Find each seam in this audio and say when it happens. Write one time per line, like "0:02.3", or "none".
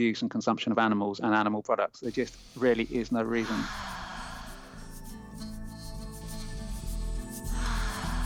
0:03.7